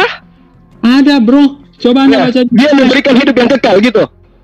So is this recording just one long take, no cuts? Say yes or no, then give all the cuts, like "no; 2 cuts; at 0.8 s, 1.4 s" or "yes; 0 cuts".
yes; 0 cuts